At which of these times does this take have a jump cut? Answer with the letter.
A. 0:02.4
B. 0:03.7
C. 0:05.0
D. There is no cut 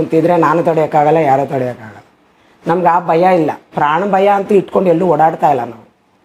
D